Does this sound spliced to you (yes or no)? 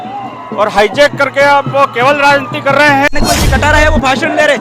yes